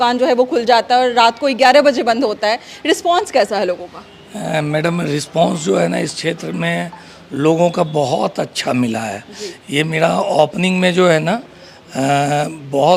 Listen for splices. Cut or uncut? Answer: uncut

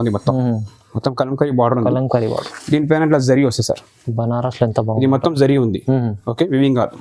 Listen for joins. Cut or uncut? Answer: uncut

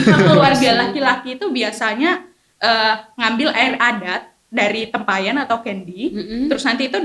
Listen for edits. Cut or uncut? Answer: uncut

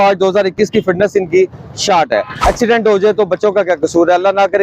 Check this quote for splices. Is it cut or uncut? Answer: cut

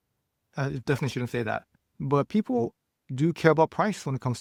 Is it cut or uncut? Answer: uncut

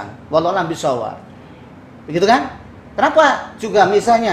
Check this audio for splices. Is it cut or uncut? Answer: uncut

